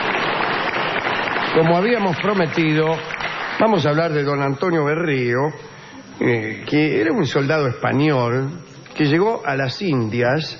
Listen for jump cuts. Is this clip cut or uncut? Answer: uncut